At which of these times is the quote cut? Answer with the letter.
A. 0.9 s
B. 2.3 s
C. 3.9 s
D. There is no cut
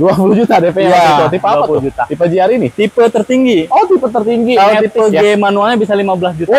D